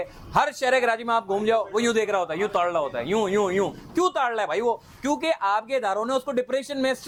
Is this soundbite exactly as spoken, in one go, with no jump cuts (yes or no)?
yes